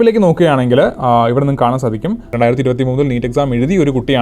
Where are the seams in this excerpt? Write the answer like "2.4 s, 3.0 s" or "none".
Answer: 2.3 s

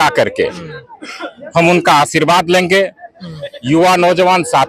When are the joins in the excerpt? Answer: none

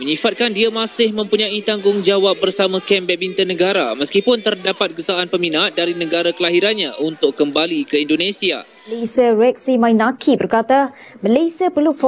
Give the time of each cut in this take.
9.0 s

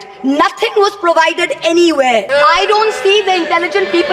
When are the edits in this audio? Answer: 2.3 s

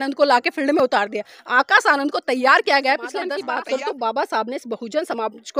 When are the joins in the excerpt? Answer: 3.3 s

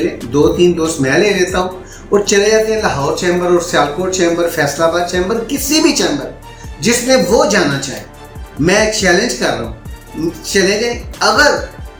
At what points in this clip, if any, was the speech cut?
none

